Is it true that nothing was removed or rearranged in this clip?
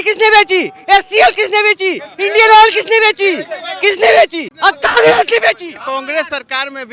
no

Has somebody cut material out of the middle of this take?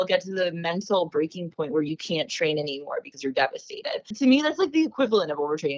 yes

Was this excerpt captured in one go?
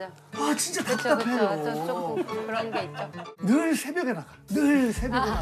no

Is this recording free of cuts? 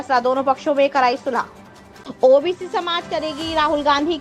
no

